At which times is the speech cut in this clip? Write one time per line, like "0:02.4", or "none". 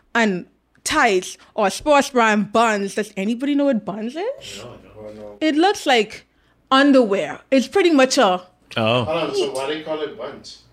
none

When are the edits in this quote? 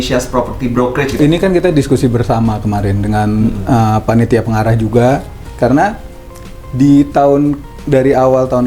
0:01.2
0:05.5

